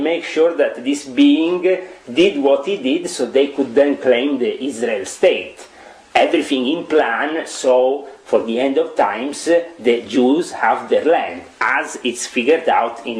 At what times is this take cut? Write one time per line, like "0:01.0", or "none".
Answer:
none